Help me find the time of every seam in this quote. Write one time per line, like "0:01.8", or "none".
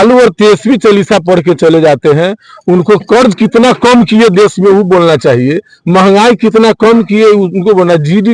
none

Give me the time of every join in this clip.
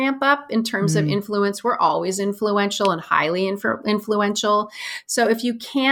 none

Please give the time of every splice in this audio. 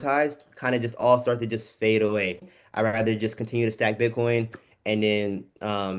0:02.5

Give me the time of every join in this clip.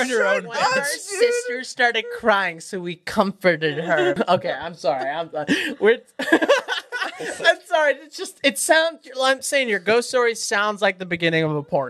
0:04.2

